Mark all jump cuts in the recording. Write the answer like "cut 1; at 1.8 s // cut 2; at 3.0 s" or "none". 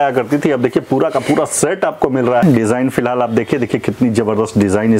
cut 1; at 2.4 s